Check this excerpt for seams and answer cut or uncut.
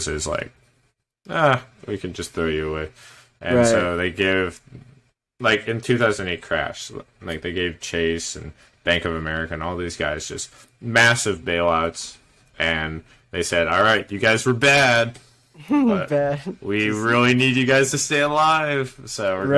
uncut